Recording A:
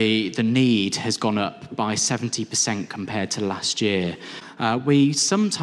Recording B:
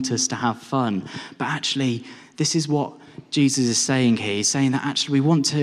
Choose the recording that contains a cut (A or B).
A